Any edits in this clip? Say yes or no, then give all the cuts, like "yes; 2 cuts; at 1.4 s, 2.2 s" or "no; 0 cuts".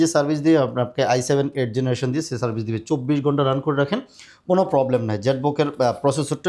no; 0 cuts